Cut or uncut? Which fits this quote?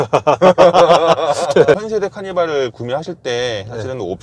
cut